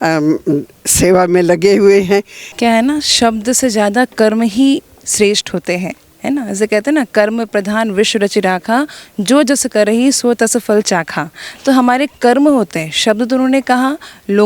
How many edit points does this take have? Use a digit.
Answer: 1